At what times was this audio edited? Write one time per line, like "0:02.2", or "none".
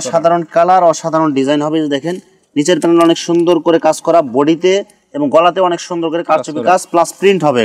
none